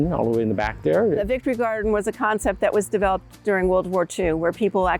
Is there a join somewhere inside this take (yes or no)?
yes